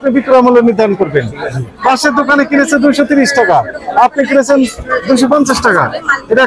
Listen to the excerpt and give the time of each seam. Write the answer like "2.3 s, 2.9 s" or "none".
none